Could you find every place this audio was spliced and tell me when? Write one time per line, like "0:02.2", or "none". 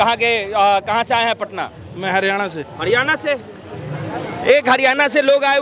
none